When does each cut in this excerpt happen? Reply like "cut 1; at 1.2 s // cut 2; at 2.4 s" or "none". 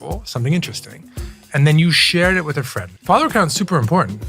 cut 1; at 2.8 s